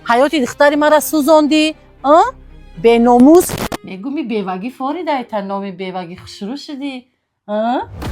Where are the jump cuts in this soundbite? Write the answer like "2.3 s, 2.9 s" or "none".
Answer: 3.6 s